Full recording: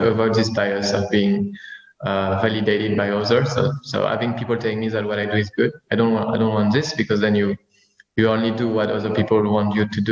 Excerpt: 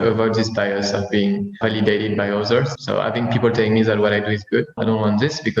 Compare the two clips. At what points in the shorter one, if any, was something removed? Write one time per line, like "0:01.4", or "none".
0:01.6
0:02.7
0:04.8